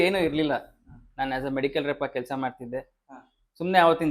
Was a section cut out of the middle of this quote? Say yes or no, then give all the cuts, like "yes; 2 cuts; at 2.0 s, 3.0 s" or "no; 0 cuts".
no; 0 cuts